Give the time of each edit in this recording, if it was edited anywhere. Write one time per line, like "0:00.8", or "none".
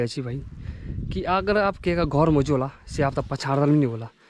none